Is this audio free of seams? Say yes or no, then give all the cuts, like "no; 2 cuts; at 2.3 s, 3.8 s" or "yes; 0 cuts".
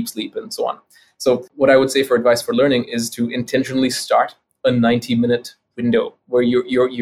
no; 1 cut; at 1.5 s